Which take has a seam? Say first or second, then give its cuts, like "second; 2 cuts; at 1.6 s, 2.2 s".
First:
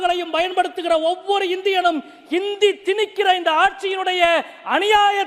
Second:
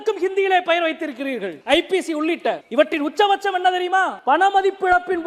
second; 3 cuts; at 1.5 s, 2.6 s, 4.1 s